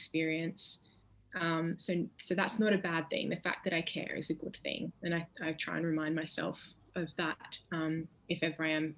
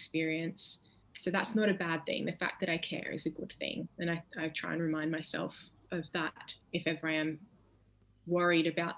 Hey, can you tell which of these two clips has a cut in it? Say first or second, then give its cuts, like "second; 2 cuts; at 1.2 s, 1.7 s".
second; 2 cuts; at 1.1 s, 6.6 s